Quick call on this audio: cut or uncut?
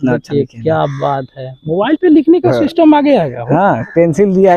uncut